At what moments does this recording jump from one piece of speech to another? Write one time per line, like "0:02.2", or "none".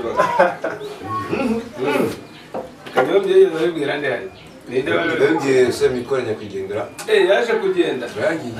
none